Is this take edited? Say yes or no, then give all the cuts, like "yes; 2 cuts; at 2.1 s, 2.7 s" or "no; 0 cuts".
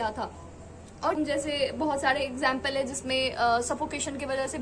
yes; 1 cut; at 1.2 s